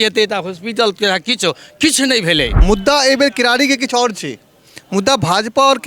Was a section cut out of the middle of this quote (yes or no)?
yes